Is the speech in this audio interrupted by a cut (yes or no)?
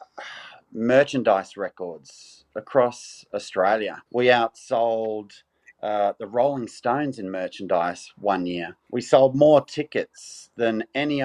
yes